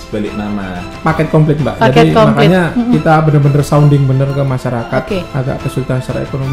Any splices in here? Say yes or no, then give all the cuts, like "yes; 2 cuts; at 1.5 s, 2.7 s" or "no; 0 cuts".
yes; 2 cuts; at 0.9 s, 5.3 s